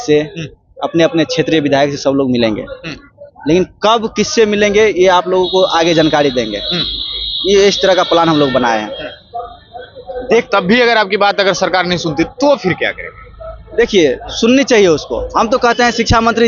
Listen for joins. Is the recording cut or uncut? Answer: uncut